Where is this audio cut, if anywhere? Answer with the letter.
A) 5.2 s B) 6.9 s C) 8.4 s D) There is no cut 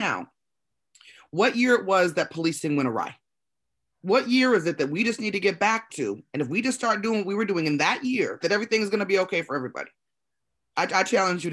C